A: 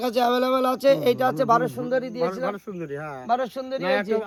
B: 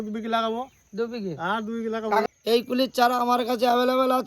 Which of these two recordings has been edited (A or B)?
B